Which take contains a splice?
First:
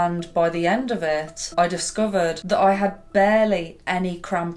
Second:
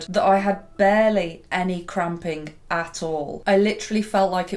second; 1 cut; at 3.3 s

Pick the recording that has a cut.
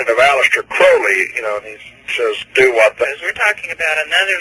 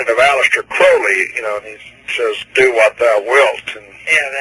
second; 1 cut; at 3.0 s

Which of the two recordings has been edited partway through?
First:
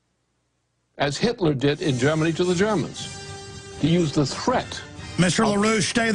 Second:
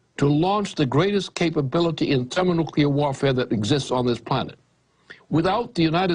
second; 1 cut; at 1.7 s

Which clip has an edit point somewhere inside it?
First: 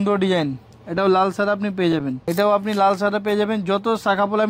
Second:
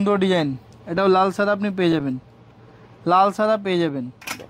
first; 1 cut; at 2.3 s

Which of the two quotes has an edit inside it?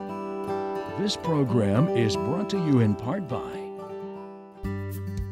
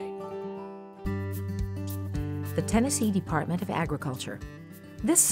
first; 1 cut; at 1.1 s

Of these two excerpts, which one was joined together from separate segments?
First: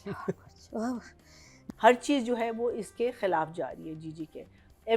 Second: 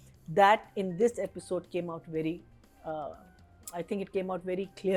first; 1 cut; at 1.6 s

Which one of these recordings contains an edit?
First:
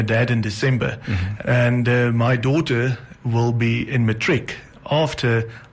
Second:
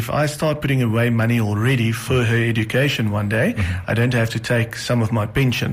first; 1 cut; at 1.2 s

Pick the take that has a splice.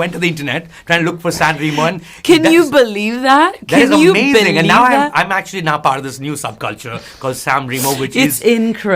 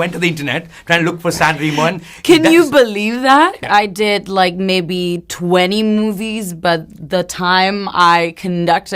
second; 1 cut; at 3.6 s

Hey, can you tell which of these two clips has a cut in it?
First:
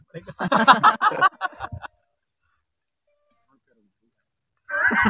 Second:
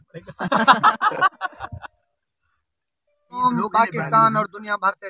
second; 1 cut; at 3.4 s

